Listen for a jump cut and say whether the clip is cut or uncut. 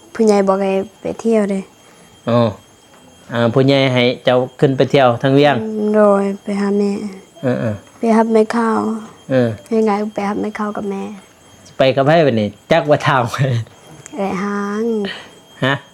uncut